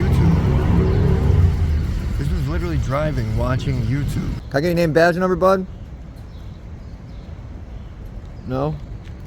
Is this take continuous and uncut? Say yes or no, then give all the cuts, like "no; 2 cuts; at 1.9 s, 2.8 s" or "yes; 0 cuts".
no; 1 cut; at 4.4 s